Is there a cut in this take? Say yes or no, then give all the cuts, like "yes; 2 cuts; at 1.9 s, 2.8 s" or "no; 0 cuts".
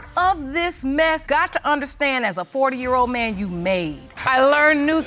yes; 1 cut; at 4.1 s